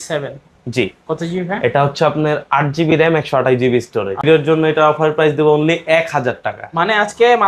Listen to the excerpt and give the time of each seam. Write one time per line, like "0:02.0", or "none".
0:04.2